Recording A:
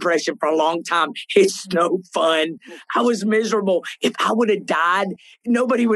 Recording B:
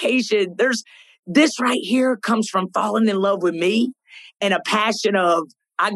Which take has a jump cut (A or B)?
B